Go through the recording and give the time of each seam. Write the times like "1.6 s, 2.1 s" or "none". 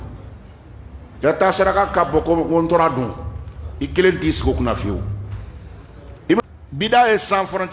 6.4 s